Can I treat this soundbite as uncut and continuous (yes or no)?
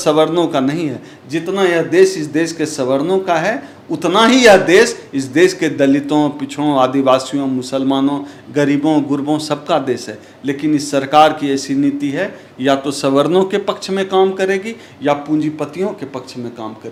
yes